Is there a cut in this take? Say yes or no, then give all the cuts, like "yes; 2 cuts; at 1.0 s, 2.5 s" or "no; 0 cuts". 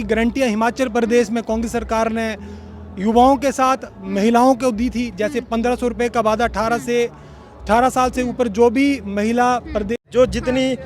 yes; 1 cut; at 9.9 s